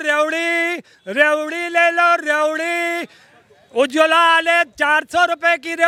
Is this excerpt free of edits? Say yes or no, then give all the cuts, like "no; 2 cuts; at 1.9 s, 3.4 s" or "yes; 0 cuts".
yes; 0 cuts